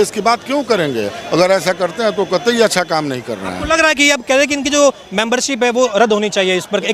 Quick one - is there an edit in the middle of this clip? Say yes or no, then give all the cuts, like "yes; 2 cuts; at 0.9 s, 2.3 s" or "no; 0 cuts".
no; 0 cuts